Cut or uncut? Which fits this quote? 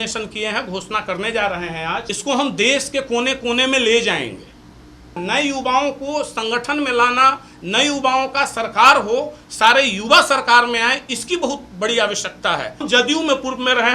cut